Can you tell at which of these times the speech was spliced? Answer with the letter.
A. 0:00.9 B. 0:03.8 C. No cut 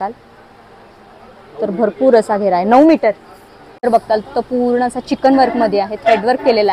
B